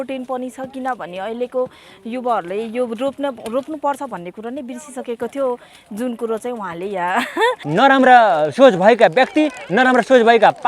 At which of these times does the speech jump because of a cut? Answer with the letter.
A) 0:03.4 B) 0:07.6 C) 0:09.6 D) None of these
B